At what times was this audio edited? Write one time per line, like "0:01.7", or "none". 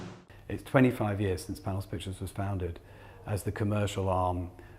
0:01.6

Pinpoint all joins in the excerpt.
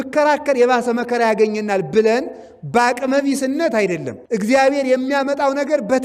0:04.1

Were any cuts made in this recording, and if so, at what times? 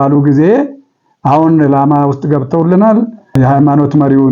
0:03.3

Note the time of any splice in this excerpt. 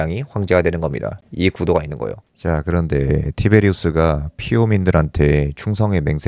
0:02.3

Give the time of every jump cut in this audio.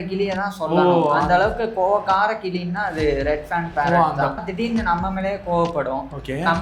0:04.4

